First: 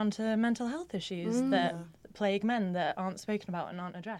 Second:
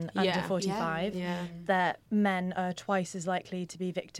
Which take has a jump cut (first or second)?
second